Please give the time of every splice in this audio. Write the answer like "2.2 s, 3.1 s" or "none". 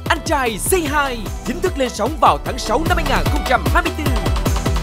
none